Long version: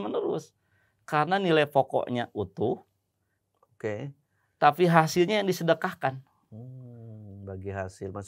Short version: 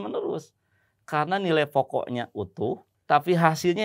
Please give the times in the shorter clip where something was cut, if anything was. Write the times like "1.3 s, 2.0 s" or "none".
2.9 s